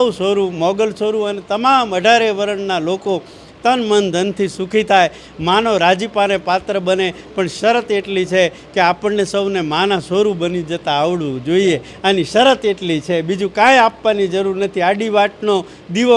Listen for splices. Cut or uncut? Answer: uncut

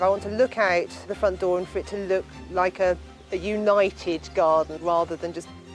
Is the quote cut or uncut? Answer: cut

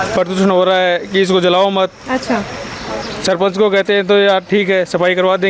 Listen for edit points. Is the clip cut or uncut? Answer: uncut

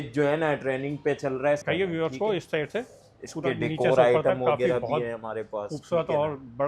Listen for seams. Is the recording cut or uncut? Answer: cut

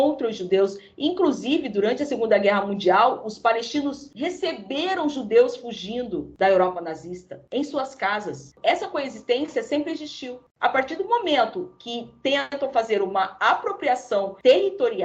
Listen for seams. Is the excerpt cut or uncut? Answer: cut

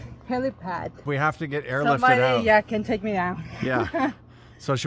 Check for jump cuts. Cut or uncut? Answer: cut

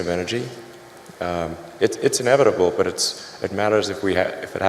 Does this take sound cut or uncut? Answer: cut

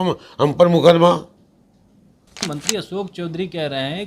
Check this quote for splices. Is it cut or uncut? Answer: cut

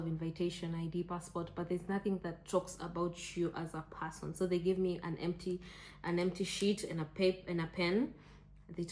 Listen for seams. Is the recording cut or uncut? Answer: uncut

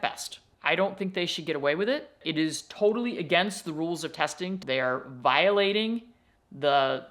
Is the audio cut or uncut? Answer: cut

